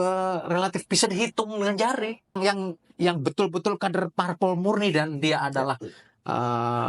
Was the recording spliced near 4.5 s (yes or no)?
no